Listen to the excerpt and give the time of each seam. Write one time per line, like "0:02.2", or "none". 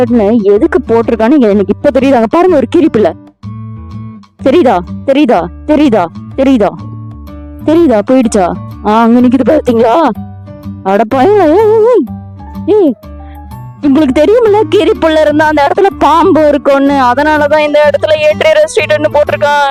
none